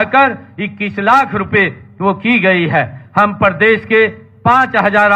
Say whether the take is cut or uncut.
uncut